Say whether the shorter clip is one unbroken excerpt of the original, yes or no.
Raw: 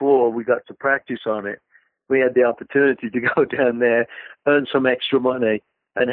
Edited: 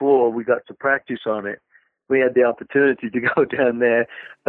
yes